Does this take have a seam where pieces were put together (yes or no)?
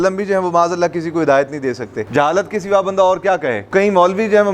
yes